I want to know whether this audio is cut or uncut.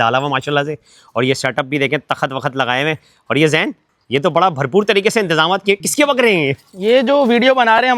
uncut